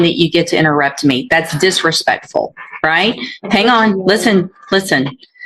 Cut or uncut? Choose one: uncut